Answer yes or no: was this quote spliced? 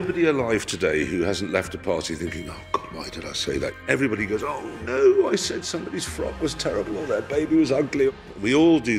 no